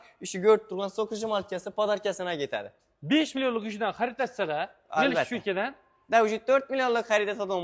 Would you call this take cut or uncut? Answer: uncut